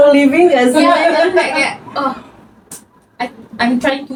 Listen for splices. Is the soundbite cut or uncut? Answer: uncut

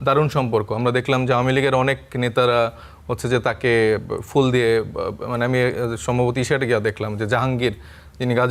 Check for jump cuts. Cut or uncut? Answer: uncut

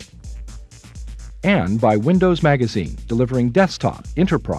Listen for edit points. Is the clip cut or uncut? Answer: uncut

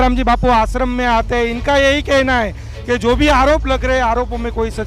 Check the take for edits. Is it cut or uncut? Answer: uncut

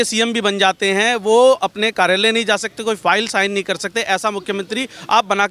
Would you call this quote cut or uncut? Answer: uncut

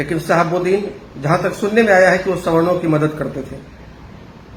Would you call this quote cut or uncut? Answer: uncut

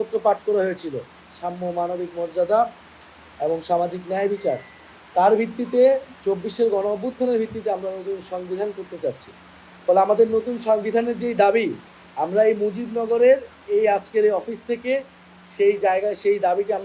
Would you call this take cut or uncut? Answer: uncut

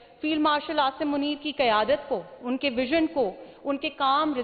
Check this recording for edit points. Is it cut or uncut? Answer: uncut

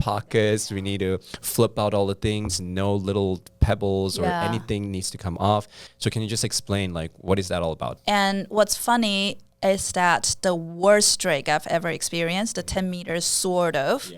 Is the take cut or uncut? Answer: cut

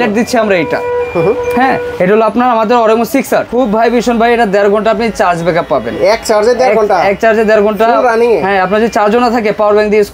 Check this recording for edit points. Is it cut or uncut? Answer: cut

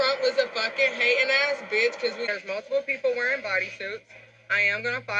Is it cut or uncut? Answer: cut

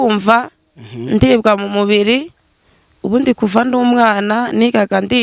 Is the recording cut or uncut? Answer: uncut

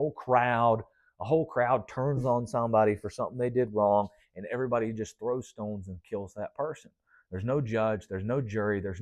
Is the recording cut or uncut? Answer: uncut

